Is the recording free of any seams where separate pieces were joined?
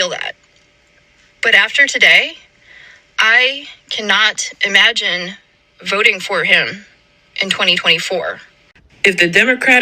no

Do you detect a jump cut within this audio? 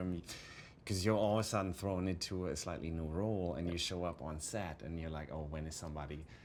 no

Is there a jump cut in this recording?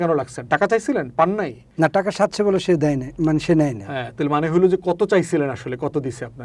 yes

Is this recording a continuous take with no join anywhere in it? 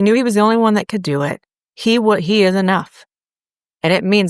yes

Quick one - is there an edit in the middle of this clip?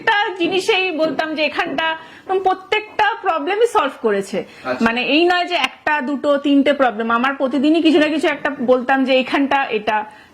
no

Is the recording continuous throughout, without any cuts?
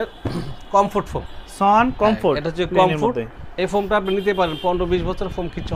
yes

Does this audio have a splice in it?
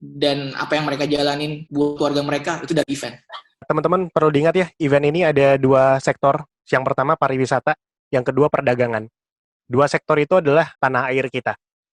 yes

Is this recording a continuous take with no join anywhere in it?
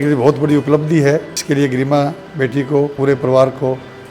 no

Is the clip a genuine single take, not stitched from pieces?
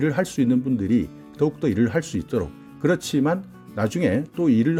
yes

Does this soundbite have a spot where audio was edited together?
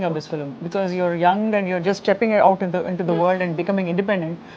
no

